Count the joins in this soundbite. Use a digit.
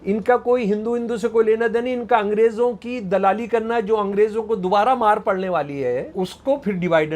1